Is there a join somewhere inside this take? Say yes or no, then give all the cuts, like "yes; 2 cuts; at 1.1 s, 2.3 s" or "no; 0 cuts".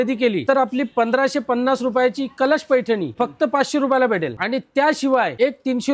no; 0 cuts